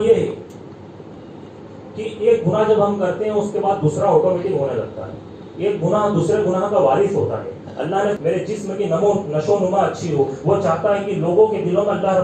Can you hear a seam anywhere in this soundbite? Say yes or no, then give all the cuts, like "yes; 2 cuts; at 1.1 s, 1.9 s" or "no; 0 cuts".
yes; 1 cut; at 8.2 s